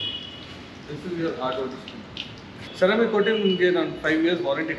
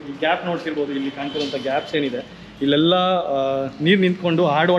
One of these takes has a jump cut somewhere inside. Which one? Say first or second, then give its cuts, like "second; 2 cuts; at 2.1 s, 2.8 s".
first; 1 cut; at 2.6 s